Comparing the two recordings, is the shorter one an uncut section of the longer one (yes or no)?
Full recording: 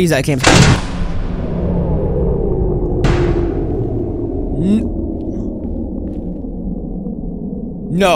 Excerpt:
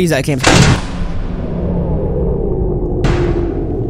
yes